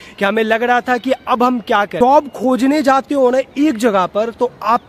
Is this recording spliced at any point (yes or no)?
yes